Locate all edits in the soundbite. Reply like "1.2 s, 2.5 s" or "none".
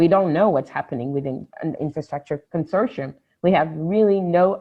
1.9 s